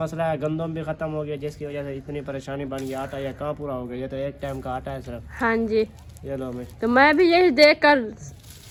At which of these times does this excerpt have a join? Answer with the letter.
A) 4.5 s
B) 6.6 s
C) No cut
C